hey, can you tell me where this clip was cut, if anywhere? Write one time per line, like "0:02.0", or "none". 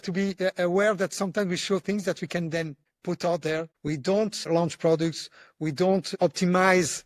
0:02.8
0:04.1
0:06.1